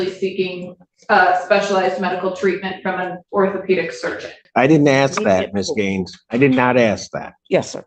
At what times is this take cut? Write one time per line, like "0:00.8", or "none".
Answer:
0:04.4